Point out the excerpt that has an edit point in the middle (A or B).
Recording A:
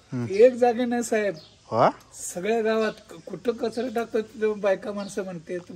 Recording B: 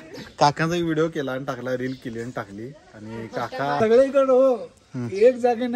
B